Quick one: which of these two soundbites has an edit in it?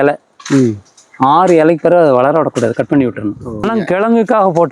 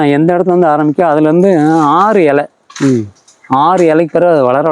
first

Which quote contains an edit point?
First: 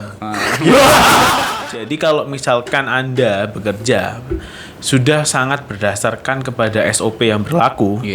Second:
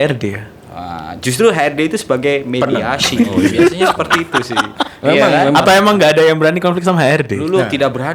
first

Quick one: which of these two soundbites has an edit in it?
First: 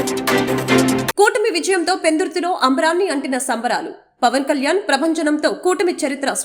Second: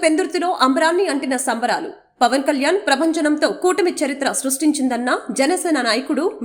first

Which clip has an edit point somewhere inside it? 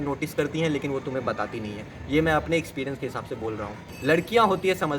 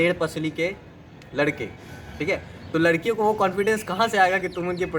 first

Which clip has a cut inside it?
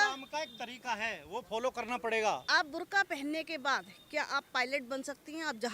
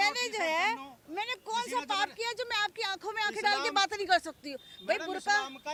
first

